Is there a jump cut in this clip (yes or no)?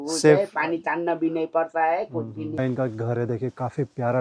yes